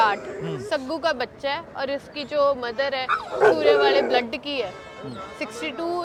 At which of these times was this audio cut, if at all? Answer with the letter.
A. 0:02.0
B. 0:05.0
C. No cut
C